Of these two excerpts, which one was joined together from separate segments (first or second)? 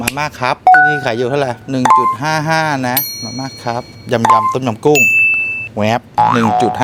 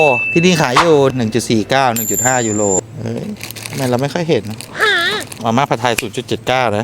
second